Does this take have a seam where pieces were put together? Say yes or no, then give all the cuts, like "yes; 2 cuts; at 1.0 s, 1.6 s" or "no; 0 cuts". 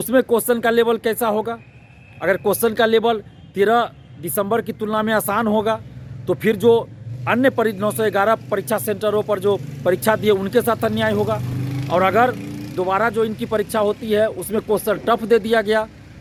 no; 0 cuts